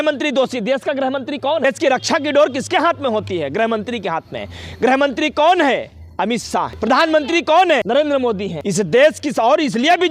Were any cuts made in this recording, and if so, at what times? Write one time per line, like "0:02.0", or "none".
0:01.6
0:06.7
0:08.2